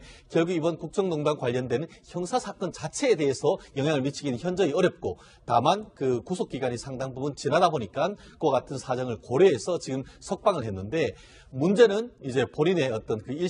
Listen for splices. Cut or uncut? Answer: cut